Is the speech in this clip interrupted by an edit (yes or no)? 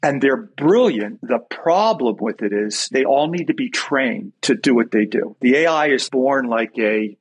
yes